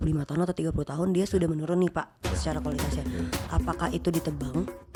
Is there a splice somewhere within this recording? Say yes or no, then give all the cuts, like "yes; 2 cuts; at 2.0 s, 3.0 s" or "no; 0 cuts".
no; 0 cuts